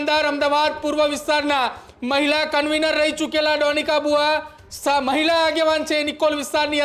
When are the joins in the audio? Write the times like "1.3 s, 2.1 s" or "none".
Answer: none